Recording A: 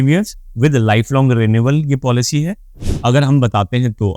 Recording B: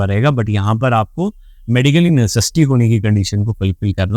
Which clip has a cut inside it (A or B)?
A